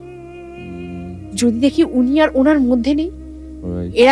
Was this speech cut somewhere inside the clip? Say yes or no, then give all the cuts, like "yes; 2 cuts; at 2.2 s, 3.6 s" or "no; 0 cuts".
no; 0 cuts